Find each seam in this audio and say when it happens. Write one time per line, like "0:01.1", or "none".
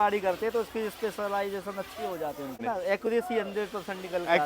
0:02.6